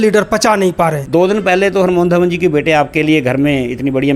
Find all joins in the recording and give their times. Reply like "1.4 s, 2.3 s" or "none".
1.0 s